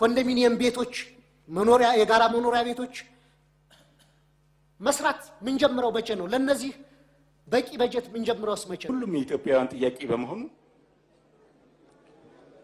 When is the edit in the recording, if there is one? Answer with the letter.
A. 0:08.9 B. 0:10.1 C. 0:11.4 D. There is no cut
A